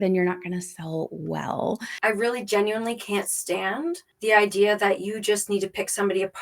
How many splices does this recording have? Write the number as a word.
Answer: two